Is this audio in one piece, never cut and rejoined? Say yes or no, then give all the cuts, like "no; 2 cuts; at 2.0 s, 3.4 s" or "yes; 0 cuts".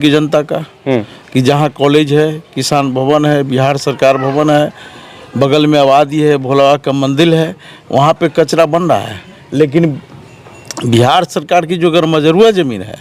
yes; 0 cuts